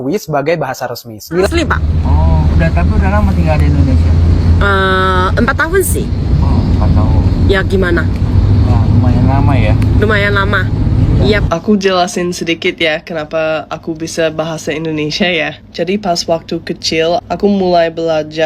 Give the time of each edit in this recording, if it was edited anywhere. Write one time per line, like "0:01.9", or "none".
0:01.5
0:11.4